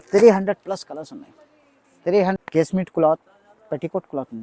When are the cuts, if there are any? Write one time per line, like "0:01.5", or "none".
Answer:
0:02.4